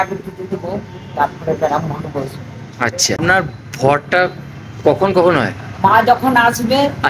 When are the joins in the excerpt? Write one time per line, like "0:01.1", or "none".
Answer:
0:03.2